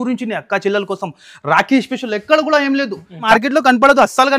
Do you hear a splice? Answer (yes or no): yes